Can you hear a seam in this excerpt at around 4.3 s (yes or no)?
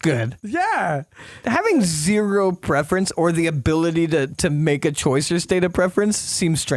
yes